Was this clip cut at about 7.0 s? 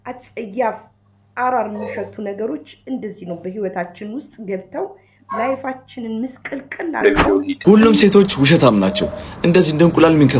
yes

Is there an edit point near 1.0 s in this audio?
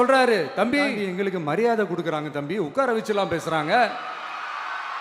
yes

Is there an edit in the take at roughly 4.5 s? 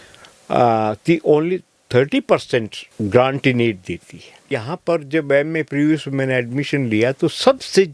yes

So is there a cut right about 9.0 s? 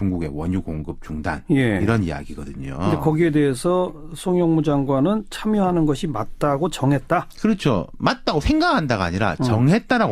yes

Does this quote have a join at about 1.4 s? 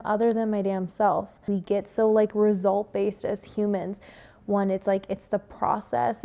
yes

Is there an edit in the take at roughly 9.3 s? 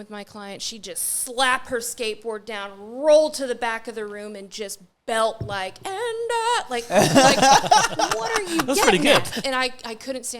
yes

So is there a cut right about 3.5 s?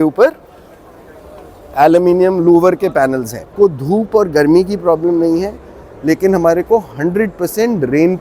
yes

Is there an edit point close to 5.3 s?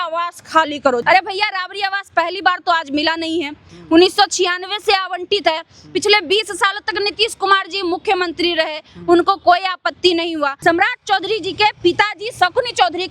no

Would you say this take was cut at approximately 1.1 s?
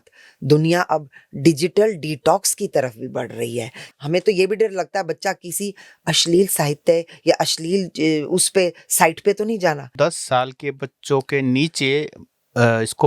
no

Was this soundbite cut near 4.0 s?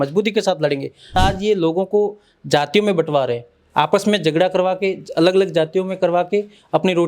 no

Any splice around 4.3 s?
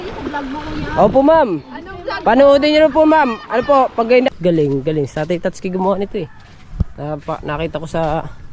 yes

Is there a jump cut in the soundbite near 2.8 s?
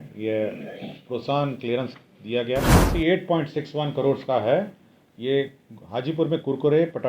yes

